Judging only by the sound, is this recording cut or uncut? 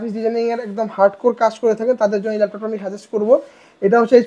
uncut